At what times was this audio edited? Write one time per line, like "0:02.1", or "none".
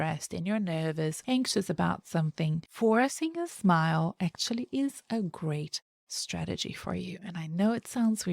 0:01.2
0:02.7